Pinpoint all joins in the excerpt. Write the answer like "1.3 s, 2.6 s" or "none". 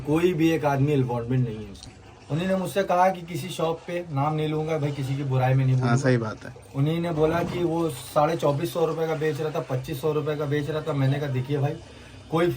1.8 s